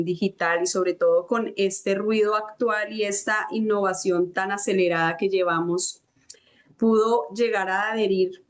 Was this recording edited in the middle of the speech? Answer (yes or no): no